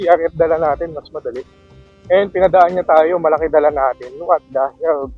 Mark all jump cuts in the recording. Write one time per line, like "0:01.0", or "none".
none